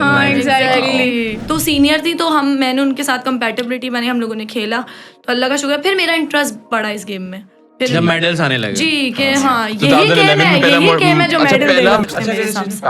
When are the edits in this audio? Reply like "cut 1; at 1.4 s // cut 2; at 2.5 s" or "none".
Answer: cut 1; at 1.4 s // cut 2; at 12.0 s

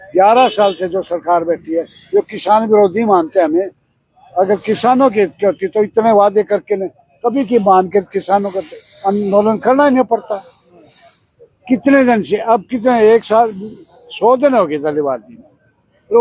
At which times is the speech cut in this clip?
none

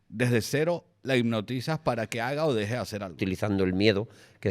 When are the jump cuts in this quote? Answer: cut 1; at 3.2 s

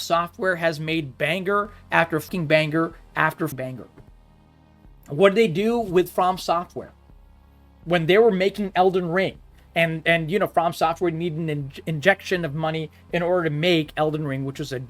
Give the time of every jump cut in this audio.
cut 1; at 2.3 s // cut 2; at 3.5 s

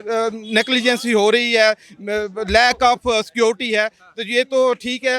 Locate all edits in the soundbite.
none

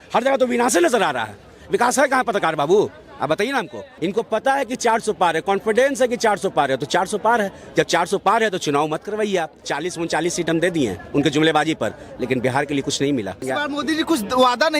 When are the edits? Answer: cut 1; at 3.8 s // cut 2; at 9.6 s // cut 3; at 13.5 s

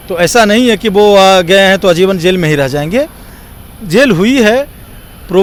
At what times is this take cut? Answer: none

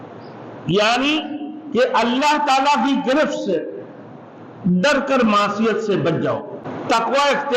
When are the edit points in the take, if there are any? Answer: cut 1; at 6.6 s

